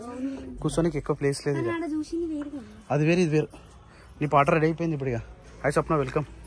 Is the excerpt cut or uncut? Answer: uncut